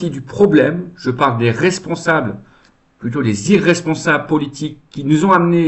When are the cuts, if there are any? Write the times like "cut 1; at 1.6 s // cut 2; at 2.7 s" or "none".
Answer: none